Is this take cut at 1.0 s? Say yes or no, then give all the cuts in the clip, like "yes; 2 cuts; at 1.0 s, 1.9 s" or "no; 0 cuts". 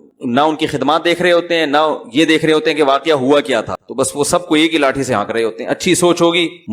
no; 1 cut; at 3.8 s